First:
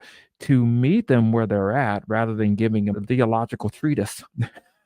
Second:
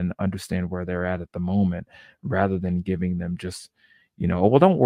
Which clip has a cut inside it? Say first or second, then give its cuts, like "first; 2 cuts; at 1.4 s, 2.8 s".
first; 1 cut; at 3.0 s